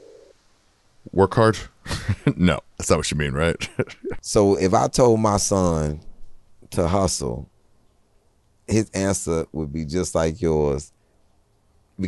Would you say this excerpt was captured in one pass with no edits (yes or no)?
no